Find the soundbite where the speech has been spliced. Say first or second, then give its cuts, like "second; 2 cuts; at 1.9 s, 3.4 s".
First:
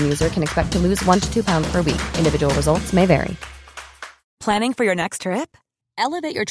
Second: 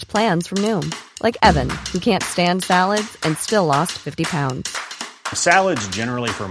first; 1 cut; at 4.1 s